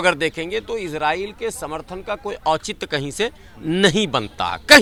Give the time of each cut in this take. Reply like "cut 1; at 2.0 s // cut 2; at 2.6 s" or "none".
none